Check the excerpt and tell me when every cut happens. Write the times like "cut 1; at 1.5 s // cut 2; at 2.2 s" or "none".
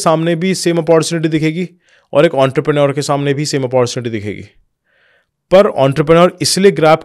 none